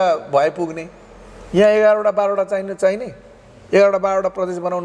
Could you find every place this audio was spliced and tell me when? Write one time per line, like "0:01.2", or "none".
none

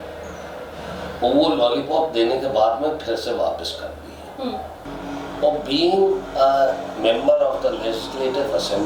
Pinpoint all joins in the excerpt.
0:04.8

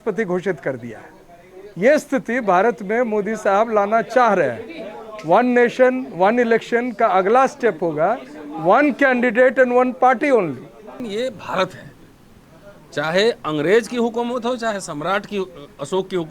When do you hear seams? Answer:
0:11.1

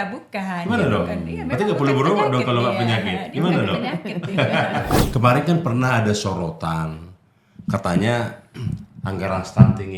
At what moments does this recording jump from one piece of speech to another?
0:05.0

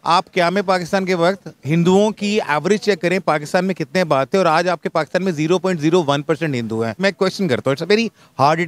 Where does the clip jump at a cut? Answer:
0:06.9

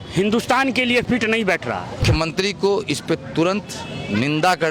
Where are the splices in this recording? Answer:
0:02.0

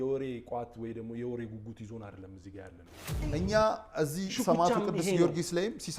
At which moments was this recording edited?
0:03.2

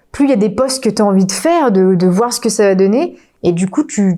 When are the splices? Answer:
none

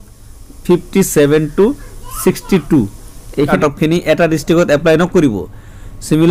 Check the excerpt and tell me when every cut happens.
0:03.6

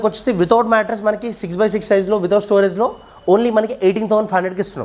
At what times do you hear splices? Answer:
none

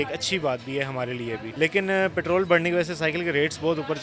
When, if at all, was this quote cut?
0:01.5

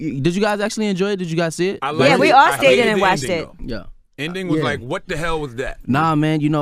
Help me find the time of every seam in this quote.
none

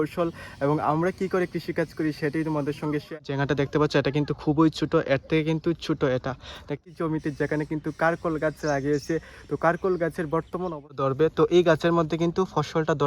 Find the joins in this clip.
0:03.2
0:06.6
0:11.0

